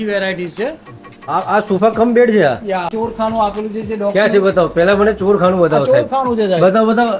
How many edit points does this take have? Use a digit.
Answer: 1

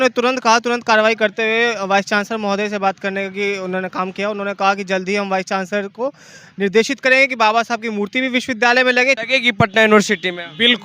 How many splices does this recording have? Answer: 1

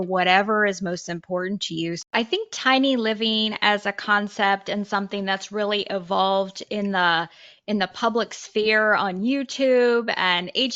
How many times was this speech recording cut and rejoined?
1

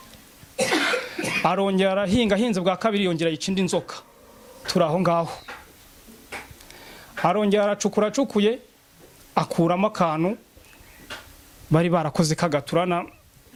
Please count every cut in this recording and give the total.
0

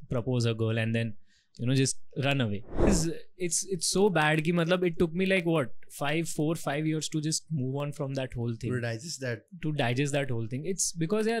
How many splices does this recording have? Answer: 1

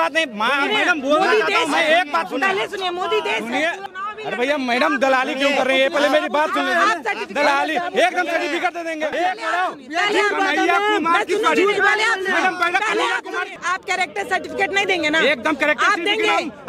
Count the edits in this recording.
3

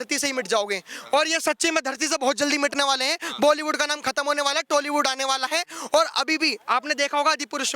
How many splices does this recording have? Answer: 0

